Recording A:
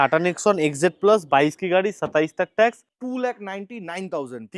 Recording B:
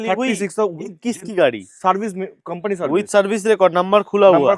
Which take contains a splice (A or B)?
A